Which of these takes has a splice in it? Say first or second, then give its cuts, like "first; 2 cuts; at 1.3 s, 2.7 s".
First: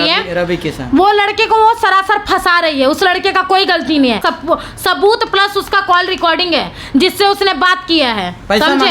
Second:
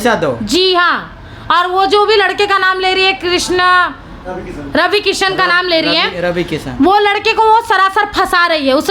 first; 1 cut; at 4.2 s